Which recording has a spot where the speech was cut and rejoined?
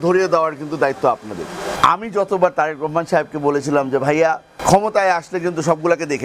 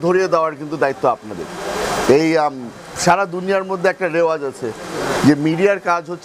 first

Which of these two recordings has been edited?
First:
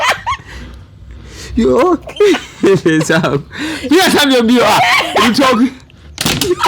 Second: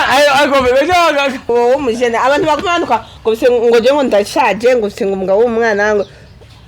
second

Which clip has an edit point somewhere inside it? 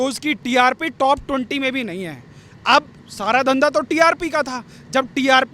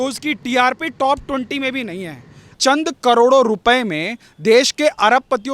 second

